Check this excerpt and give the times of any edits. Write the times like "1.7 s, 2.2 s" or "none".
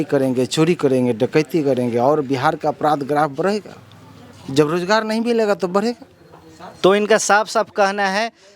none